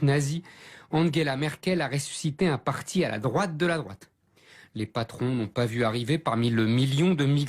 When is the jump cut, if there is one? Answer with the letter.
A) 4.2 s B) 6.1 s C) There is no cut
A